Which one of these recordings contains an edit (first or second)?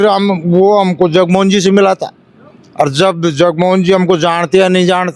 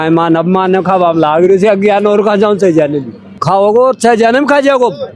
second